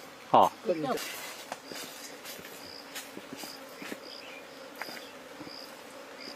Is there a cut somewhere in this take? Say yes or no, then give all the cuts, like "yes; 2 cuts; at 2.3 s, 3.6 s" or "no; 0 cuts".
no; 0 cuts